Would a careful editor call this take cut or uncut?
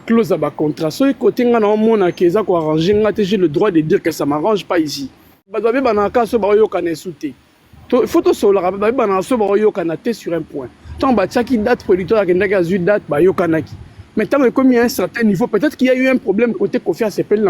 cut